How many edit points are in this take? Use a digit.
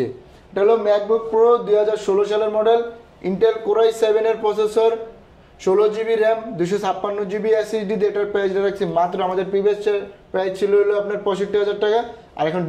0